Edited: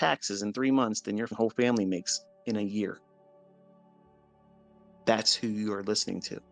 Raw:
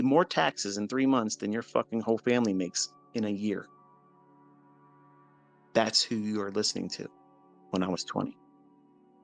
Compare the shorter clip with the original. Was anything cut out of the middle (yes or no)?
yes